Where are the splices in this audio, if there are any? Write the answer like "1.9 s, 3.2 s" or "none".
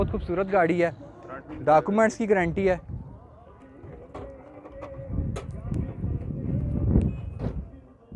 none